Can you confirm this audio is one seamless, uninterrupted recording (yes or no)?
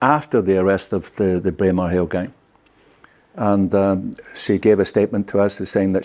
yes